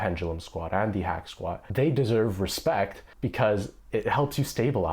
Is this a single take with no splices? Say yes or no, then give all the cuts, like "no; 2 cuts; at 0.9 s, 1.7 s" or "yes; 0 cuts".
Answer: no; 2 cuts; at 3.0 s, 3.8 s